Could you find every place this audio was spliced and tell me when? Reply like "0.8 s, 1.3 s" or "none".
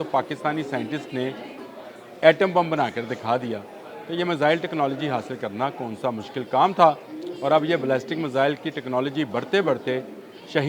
none